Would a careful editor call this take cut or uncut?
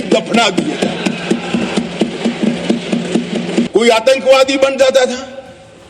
cut